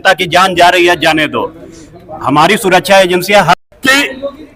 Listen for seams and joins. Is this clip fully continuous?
no; 1 cut; at 3.6 s

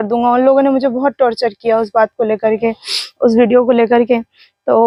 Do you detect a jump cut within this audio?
no; 0 cuts

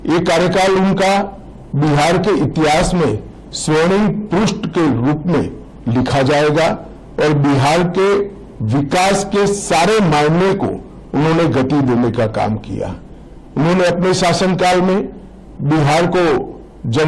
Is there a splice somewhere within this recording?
no; 0 cuts

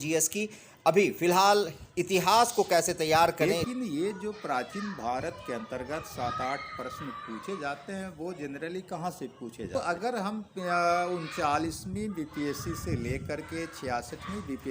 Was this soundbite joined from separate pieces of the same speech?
yes; 2 cuts; at 3.6 s, 9.7 s

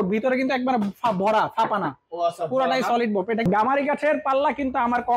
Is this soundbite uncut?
no; 1 cut; at 3.4 s

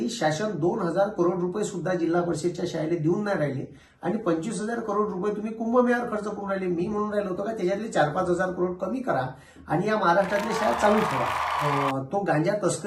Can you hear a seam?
yes; 1 cut; at 11.6 s

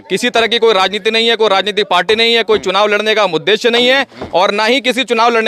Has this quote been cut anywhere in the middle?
no; 0 cuts

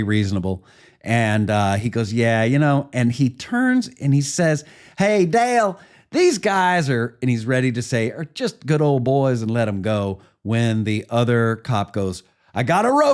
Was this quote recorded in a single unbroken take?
yes; 0 cuts

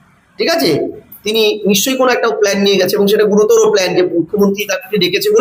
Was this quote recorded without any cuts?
yes; 0 cuts

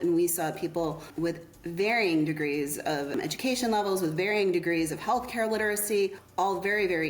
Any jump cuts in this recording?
yes; 3 cuts; at 1.1 s, 3.1 s, 6.2 s

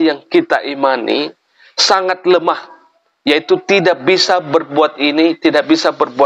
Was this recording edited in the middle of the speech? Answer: no; 0 cuts

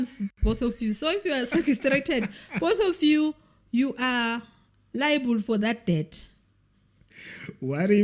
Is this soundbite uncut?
yes; 0 cuts

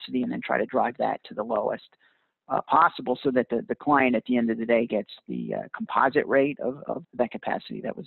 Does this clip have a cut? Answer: yes; 1 cut; at 7.0 s

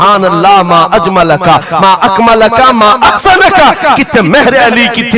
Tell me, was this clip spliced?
no; 0 cuts

